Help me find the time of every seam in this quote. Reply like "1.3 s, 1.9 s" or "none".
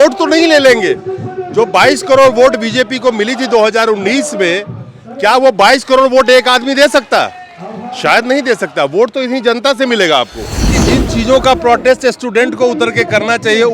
10.8 s